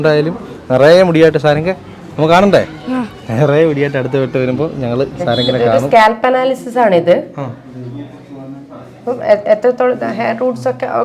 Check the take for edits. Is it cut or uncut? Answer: cut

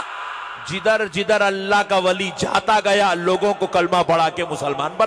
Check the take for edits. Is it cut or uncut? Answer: uncut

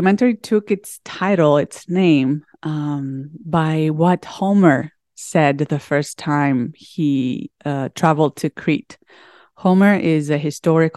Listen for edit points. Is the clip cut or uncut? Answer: uncut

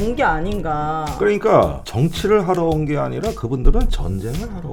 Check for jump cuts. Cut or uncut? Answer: uncut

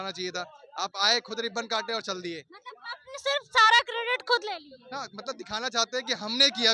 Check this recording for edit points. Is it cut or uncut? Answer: uncut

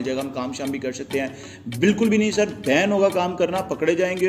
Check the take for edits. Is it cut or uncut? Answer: uncut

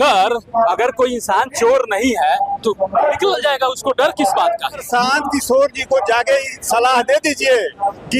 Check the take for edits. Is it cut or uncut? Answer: cut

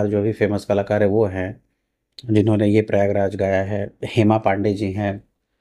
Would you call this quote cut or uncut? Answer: uncut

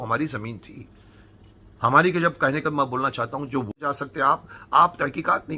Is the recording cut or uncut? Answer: cut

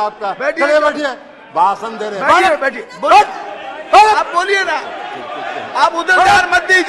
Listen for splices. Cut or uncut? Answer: uncut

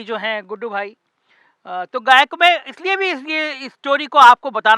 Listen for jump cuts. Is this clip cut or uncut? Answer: uncut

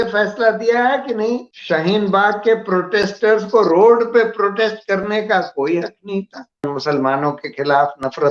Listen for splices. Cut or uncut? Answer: cut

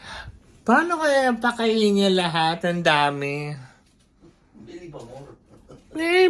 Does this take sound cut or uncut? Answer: uncut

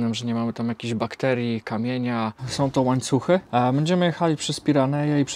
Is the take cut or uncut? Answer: cut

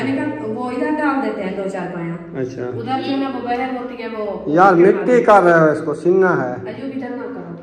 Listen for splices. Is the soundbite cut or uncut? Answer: uncut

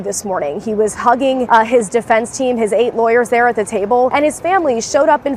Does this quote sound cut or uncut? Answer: cut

